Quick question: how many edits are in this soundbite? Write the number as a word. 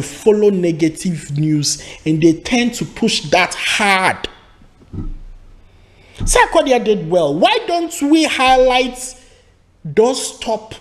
zero